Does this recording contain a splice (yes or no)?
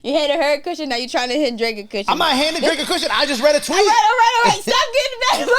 no